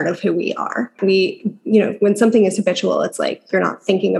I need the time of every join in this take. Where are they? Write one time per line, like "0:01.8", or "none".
0:00.9